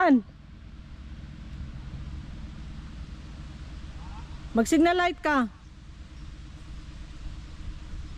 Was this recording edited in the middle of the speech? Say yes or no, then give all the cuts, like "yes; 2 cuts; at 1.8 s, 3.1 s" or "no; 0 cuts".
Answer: no; 0 cuts